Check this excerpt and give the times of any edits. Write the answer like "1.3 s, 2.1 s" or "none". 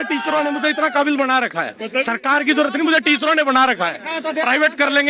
none